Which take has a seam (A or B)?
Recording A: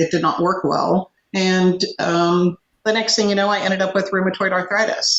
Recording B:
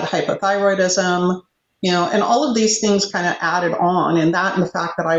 A